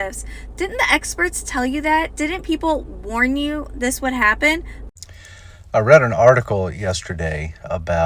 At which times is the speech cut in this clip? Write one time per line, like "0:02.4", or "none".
0:04.8